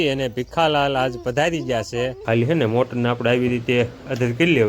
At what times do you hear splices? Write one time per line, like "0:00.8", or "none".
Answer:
0:02.2